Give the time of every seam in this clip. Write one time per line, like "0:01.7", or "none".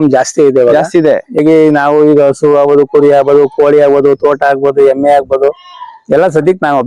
0:01.4